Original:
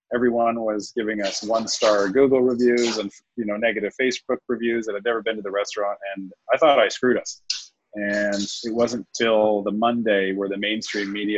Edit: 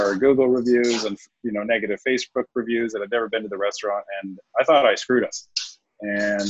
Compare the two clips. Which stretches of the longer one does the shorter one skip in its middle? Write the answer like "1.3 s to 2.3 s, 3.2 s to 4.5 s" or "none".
none